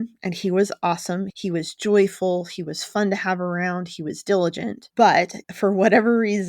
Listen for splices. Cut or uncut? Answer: cut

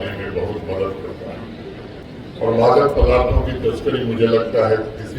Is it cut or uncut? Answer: cut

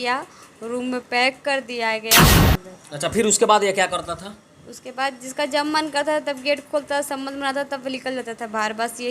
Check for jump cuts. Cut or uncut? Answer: cut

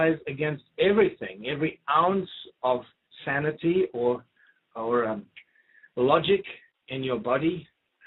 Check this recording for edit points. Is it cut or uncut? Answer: cut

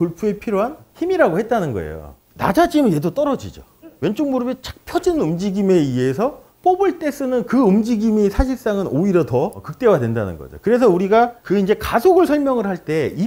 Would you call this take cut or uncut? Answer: uncut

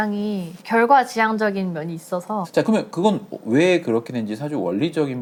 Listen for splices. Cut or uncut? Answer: uncut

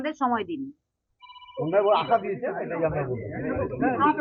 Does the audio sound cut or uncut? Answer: uncut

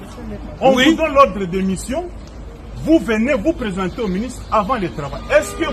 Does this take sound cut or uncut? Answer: uncut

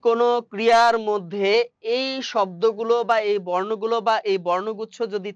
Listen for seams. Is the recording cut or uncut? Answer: uncut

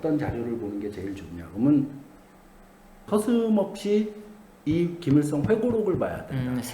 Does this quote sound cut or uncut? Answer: cut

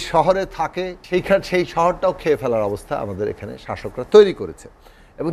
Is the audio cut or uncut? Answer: cut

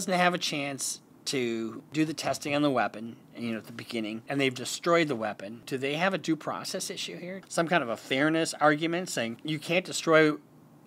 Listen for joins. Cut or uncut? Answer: cut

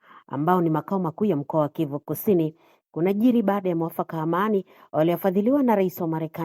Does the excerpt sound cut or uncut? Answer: uncut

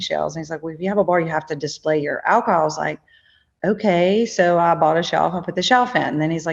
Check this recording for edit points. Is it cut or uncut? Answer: uncut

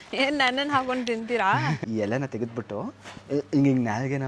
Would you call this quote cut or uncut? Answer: cut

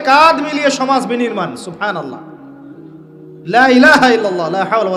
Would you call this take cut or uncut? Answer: uncut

